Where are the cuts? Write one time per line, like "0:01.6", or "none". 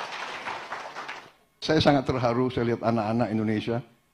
none